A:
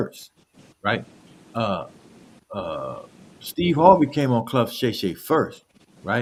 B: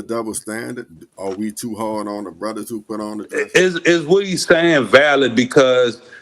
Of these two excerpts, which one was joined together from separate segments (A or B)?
B